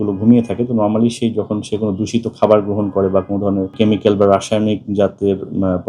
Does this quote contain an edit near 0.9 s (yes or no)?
no